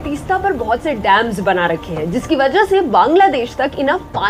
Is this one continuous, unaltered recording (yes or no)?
yes